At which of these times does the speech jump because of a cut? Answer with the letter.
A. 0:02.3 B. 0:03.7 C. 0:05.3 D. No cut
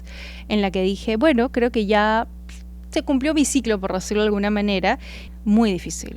C